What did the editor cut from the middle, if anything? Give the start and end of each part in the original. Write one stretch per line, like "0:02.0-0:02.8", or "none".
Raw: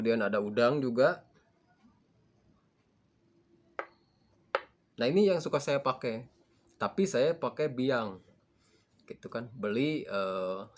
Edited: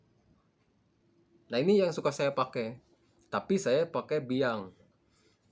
0:03.5-0:04.8